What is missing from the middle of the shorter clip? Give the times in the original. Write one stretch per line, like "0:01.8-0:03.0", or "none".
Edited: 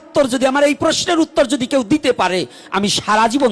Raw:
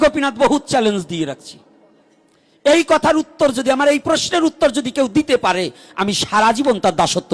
none